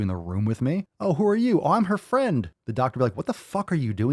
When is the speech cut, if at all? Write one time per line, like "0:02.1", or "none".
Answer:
0:00.9
0:02.6